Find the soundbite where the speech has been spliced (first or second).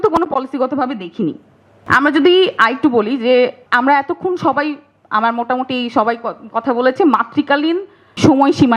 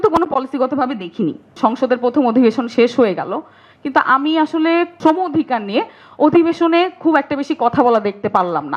second